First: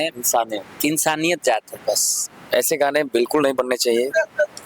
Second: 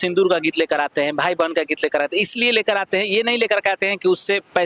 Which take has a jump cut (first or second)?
first